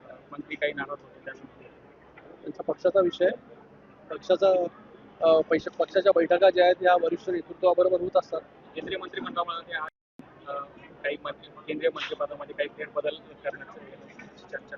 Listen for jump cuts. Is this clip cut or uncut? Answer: cut